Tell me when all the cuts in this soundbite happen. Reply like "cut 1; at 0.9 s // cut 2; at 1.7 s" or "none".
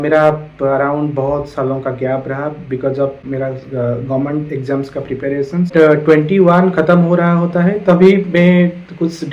cut 1; at 3.2 s // cut 2; at 5.7 s